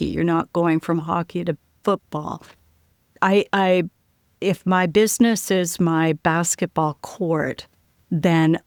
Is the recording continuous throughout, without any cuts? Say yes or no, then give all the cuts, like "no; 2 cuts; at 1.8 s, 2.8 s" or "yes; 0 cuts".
yes; 0 cuts